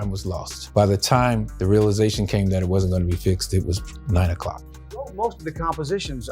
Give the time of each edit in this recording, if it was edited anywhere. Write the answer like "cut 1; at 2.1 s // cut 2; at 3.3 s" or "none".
cut 1; at 4.6 s